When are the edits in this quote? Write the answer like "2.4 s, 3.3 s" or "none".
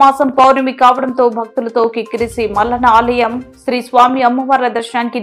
none